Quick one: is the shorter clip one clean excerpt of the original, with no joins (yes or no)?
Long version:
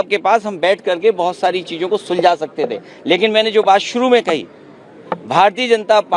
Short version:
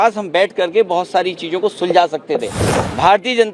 no